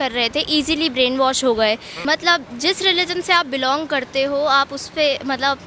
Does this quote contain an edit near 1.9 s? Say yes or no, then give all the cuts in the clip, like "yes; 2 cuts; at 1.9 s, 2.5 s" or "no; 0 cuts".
yes; 1 cut; at 1.9 s